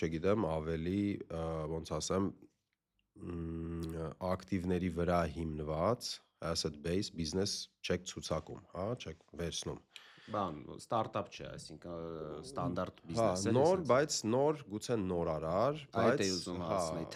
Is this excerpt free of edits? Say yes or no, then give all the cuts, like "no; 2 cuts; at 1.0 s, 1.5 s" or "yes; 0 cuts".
yes; 0 cuts